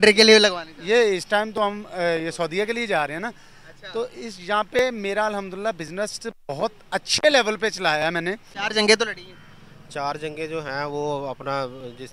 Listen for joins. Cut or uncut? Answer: cut